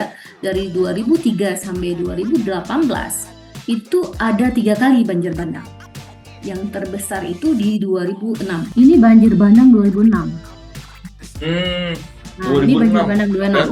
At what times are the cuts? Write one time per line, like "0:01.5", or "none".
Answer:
0:08.6

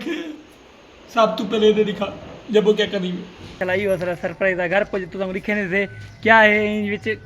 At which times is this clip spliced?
0:01.1
0:03.6

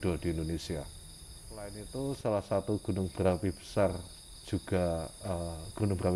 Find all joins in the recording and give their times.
0:01.8

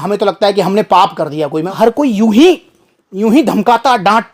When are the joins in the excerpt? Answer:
0:01.7

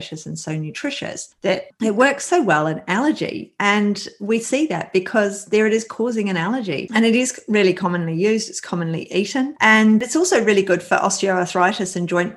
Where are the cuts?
0:01.6
0:06.8
0:10.0

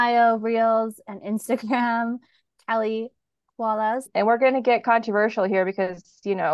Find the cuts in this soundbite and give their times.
0:04.1

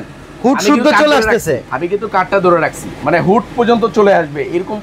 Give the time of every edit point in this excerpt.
0:01.7

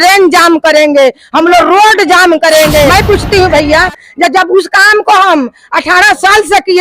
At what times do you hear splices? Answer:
0:02.9

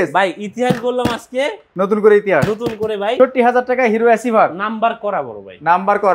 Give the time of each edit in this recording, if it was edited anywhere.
0:01.6
0:03.2

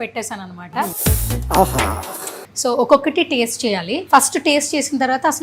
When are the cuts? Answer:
0:01.0
0:02.4
0:03.9

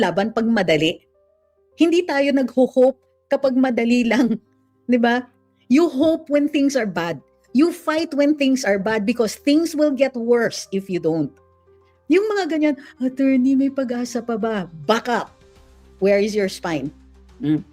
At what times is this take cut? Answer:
none

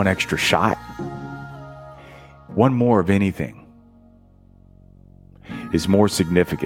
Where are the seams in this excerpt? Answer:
none

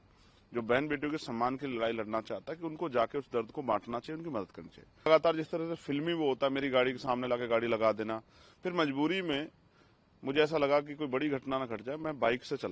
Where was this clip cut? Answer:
0:05.1

